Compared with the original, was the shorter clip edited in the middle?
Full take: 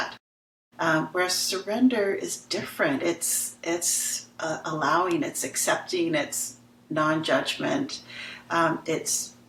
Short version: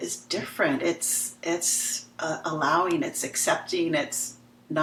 no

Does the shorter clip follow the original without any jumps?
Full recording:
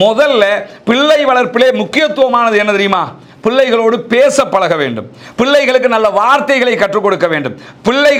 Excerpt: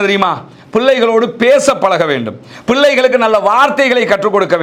yes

